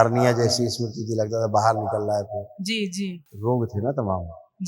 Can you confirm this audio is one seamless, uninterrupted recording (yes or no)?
no